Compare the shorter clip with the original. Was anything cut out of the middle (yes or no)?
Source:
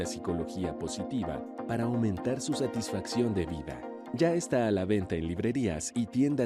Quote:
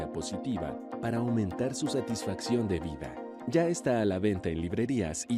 no